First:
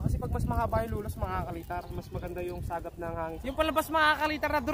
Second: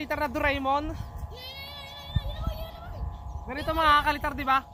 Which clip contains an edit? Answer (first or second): first